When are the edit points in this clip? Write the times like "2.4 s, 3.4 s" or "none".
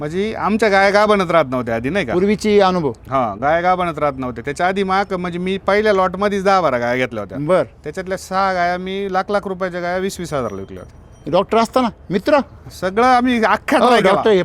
none